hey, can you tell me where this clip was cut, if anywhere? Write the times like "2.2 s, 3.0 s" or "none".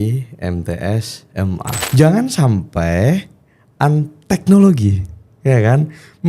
1.8 s